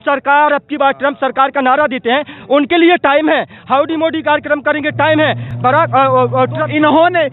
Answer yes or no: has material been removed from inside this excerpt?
no